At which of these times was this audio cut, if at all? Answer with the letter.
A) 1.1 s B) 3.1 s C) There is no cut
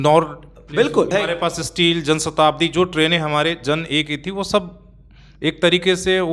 A